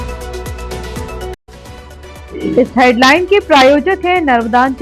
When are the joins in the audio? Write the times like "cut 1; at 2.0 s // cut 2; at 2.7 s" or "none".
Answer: cut 1; at 1.3 s